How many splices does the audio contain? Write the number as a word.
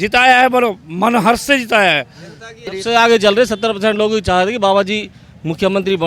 one